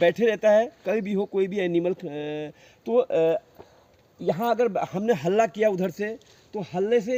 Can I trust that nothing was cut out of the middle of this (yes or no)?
yes